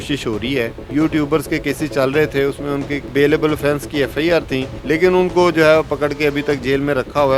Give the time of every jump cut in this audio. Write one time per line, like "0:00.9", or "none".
0:00.8
0:03.1
0:04.7